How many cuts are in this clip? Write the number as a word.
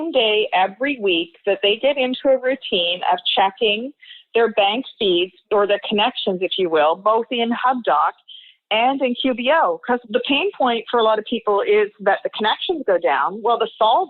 two